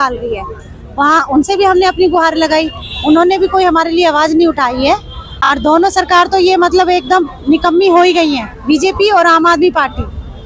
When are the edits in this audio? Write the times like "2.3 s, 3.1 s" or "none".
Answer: none